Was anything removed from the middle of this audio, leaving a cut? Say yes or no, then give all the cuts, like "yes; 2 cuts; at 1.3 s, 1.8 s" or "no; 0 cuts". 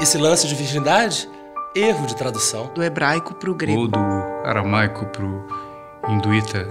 no; 0 cuts